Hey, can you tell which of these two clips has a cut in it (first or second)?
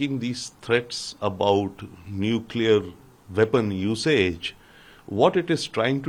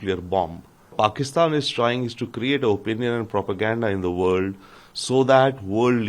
second